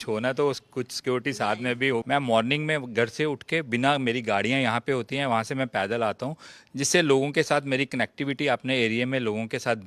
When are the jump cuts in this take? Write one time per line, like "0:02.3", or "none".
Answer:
0:02.0